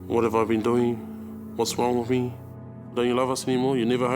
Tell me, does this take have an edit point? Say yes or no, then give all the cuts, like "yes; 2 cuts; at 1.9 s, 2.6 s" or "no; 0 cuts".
yes; 1 cut; at 2.6 s